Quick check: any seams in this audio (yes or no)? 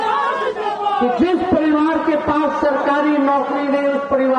no